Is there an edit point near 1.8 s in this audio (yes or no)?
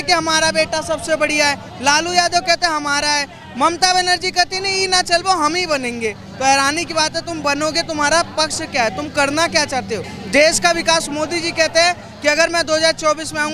no